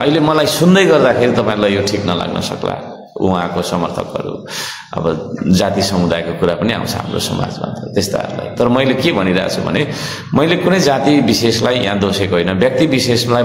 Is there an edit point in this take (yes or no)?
no